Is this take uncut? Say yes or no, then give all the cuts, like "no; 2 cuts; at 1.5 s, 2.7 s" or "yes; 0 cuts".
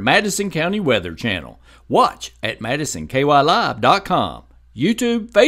yes; 0 cuts